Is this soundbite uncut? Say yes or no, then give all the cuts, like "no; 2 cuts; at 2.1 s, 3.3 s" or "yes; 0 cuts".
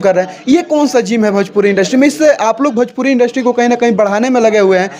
yes; 0 cuts